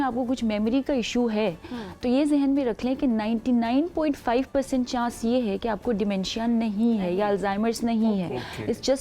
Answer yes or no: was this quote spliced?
no